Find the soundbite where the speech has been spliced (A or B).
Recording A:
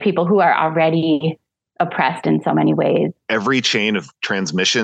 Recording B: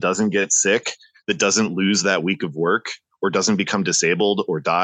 A